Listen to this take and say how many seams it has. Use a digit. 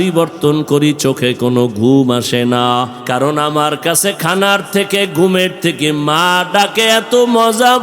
1